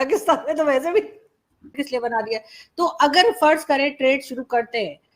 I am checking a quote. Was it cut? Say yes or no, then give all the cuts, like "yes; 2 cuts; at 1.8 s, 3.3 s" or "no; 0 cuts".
yes; 1 cut; at 1.7 s